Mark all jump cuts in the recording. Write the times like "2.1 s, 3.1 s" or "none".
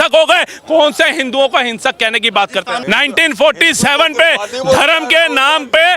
2.7 s